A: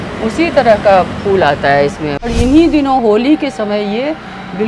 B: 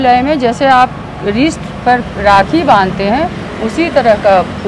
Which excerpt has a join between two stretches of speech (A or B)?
A